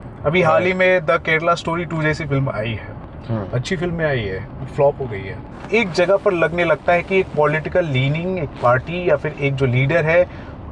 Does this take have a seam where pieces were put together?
yes; 1 cut; at 5.6 s

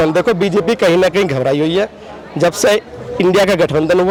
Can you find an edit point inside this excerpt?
no; 0 cuts

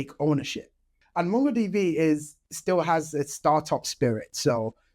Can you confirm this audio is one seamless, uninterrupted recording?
no; 1 cut; at 1.0 s

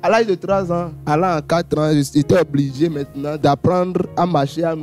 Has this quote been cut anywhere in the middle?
yes; 2 cuts; at 1.0 s, 3.4 s

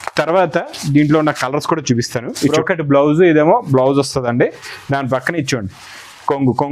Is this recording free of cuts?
no; 1 cut; at 2.5 s

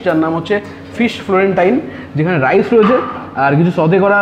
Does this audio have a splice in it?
no; 0 cuts

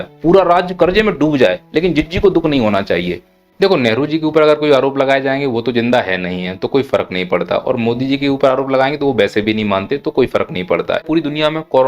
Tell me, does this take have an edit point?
yes; 2 cuts; at 3.4 s, 11.0 s

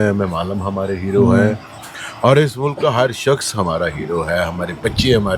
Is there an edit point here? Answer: no; 0 cuts

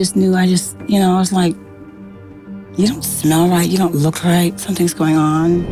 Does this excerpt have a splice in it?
no; 0 cuts

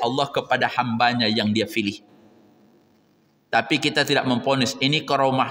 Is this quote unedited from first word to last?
yes; 0 cuts

